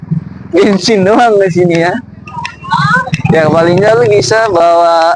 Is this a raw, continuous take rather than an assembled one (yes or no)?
yes